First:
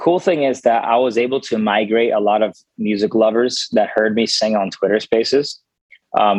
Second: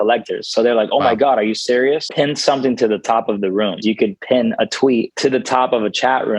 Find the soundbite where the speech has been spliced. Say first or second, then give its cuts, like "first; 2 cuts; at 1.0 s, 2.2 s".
second; 3 cuts; at 2.1 s, 3.8 s, 5.1 s